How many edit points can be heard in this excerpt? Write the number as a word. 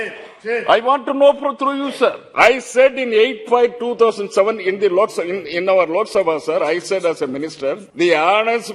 two